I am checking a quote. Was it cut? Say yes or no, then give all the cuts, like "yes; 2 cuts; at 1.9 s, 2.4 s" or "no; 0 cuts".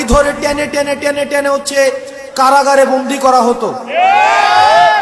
no; 0 cuts